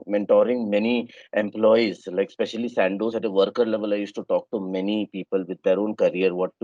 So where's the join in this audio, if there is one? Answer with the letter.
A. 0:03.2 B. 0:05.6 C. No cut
C